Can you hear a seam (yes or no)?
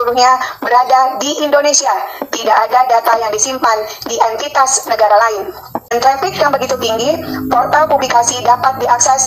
yes